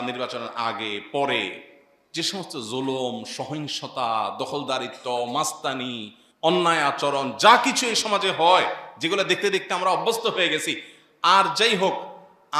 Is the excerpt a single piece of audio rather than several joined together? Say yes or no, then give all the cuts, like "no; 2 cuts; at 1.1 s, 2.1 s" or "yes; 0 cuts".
yes; 0 cuts